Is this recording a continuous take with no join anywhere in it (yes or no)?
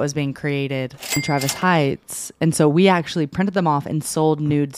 no